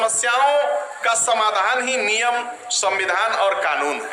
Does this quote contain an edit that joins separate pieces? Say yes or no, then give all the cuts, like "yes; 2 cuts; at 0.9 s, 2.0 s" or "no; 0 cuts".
no; 0 cuts